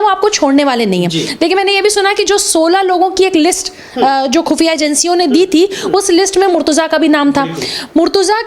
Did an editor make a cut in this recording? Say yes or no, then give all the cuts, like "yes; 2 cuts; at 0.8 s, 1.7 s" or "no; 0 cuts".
no; 0 cuts